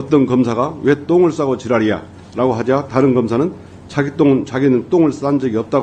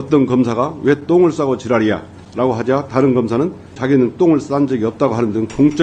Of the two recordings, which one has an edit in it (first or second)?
second